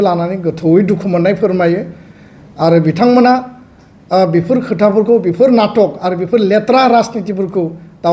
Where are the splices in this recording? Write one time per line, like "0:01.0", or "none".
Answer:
none